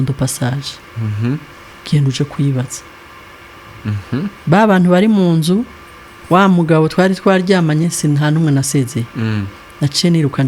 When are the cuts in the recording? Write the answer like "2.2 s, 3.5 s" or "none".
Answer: none